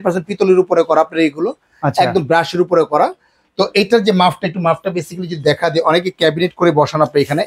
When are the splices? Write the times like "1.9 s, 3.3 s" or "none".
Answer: none